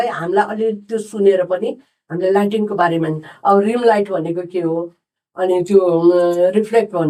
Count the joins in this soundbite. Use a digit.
0